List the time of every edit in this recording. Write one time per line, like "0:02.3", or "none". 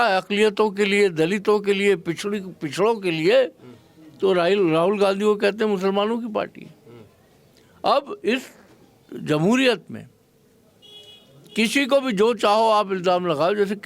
none